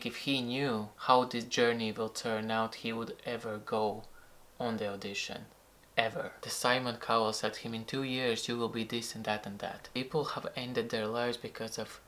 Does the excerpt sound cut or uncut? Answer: cut